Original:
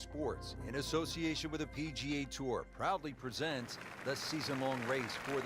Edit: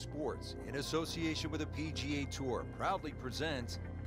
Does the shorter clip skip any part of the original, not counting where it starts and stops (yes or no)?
no